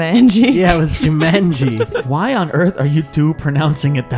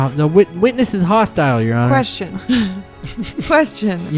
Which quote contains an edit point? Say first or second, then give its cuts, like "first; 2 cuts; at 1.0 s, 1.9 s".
first; 1 cut; at 1.9 s